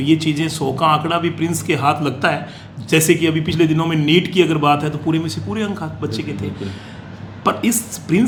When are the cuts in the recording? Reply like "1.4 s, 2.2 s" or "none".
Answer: none